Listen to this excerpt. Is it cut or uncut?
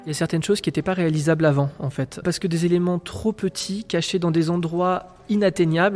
cut